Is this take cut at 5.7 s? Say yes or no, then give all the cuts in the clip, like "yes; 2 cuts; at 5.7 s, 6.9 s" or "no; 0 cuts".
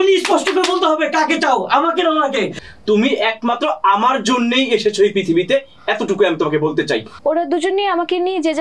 no; 2 cuts; at 2.5 s, 7.1 s